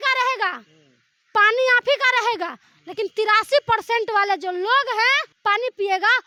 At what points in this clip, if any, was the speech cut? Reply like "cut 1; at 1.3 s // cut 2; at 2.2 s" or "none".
none